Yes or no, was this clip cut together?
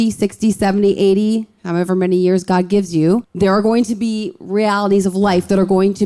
yes